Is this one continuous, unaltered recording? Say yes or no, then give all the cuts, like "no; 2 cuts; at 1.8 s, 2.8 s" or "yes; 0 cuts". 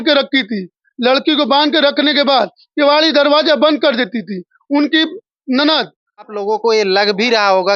no; 1 cut; at 6.3 s